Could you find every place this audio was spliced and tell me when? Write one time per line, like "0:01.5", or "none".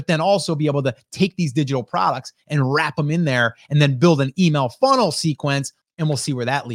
0:05.8

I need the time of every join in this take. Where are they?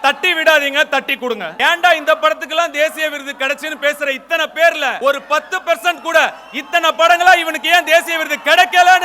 0:01.5
0:05.0

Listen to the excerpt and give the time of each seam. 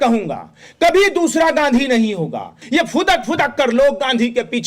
0:02.5

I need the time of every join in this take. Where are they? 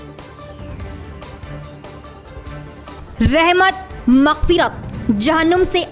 0:01.7

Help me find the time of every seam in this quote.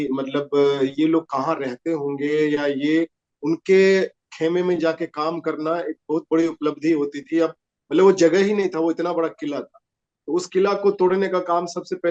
none

